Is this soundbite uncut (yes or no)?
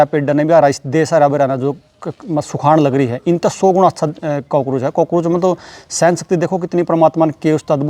yes